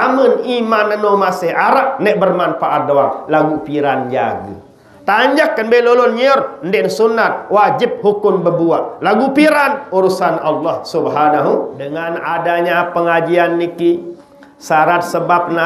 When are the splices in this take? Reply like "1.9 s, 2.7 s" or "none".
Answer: 12.1 s

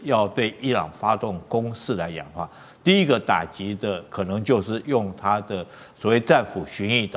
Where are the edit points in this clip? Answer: none

